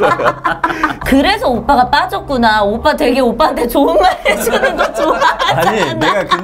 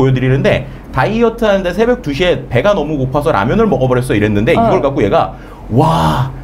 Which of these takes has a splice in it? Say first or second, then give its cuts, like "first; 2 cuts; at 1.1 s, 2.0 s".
first; 1 cut; at 1.0 s